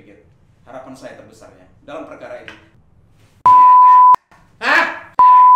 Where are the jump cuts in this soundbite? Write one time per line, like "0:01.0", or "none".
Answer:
0:02.6